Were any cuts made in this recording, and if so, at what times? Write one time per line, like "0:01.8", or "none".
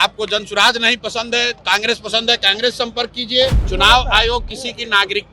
0:03.6